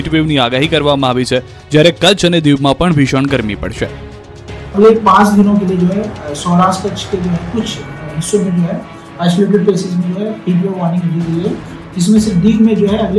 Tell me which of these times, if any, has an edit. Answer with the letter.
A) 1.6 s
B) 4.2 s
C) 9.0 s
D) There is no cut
A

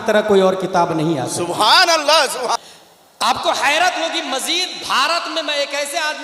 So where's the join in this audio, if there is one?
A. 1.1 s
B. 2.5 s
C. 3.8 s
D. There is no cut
B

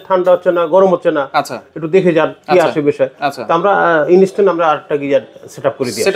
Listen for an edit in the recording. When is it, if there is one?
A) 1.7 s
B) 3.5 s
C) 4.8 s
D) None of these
D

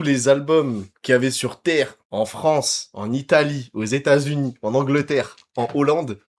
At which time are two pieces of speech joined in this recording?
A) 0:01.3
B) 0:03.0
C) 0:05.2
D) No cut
D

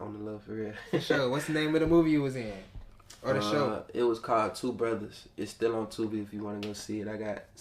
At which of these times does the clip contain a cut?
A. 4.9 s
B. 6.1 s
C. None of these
C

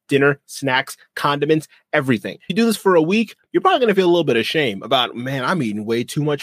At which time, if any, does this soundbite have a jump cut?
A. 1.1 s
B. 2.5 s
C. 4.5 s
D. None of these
B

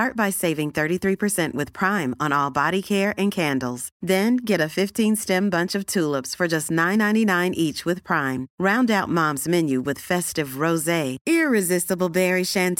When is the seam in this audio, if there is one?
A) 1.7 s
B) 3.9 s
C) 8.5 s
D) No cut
D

